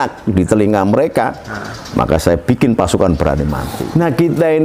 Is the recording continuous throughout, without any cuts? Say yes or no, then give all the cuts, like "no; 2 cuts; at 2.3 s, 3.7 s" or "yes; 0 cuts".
no; 1 cut; at 3.7 s